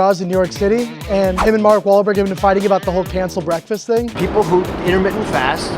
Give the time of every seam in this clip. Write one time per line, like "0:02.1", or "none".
0:01.4
0:04.1